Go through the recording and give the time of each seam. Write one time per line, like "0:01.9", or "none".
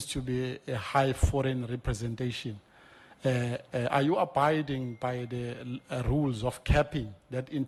none